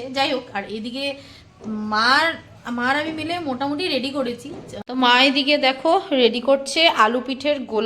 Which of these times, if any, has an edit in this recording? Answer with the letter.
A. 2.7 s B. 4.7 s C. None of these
B